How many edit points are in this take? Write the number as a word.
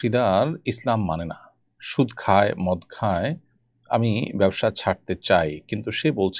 zero